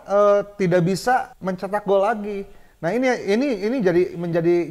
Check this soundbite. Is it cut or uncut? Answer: cut